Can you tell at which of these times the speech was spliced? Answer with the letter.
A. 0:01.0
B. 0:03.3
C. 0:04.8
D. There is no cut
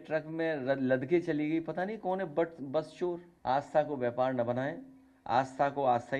B